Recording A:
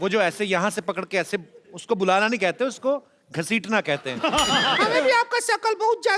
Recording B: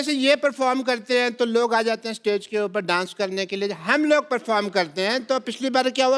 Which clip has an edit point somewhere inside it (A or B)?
A